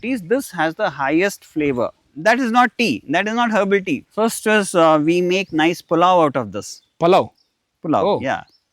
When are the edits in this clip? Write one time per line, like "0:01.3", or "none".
0:02.1
0:04.1

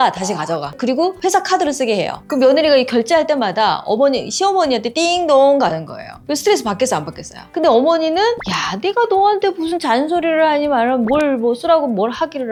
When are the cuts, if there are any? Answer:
none

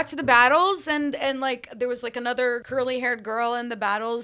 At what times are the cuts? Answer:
0:02.6

